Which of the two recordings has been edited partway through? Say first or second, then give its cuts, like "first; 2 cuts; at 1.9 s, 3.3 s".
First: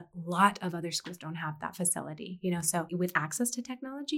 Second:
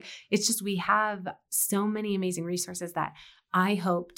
first; 1 cut; at 2.9 s